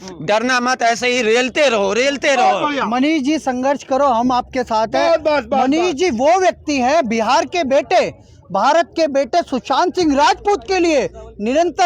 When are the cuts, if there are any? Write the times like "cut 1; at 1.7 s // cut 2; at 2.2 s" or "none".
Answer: none